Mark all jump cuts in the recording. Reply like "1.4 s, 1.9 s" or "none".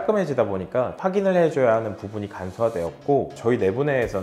0.9 s, 3.3 s